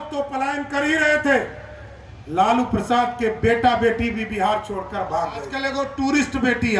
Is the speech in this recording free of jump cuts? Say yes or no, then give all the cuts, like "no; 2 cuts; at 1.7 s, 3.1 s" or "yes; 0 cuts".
no; 1 cut; at 5.5 s